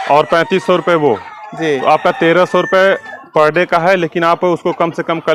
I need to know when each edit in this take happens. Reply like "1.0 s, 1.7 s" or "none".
none